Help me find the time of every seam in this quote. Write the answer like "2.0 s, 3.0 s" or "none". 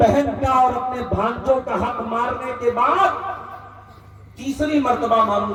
none